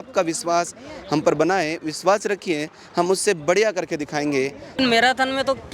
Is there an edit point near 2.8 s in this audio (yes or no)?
no